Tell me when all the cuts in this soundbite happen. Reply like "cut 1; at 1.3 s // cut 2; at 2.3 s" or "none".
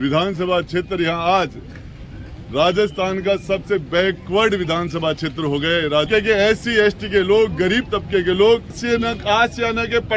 cut 1; at 6.1 s // cut 2; at 8.8 s